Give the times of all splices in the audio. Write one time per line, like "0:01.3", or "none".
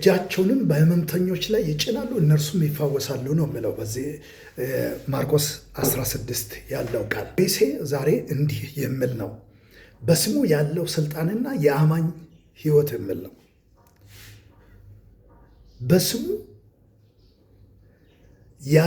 0:07.4